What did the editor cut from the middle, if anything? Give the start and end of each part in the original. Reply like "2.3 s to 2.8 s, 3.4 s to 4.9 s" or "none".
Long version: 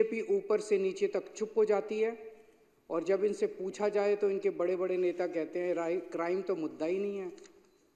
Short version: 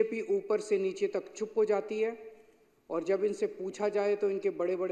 none